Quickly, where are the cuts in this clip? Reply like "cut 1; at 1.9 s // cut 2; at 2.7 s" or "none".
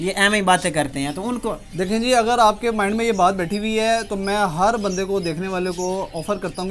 none